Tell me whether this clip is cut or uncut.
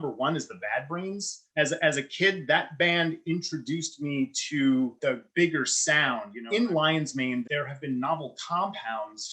cut